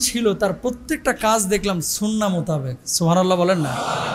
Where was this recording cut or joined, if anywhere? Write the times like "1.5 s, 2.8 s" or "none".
none